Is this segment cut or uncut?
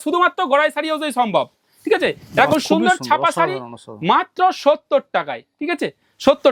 uncut